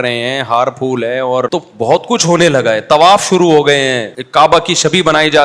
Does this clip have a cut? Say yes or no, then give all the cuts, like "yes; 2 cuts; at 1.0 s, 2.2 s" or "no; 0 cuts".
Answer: yes; 2 cuts; at 2.0 s, 4.1 s